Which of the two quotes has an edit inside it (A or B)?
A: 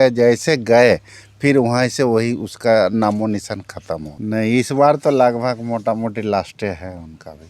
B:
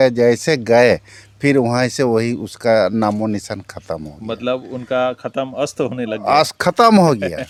A